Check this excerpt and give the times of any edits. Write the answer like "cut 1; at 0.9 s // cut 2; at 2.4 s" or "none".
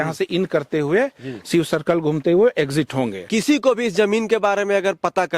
cut 1; at 3.2 s